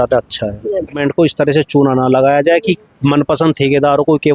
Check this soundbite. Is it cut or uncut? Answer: cut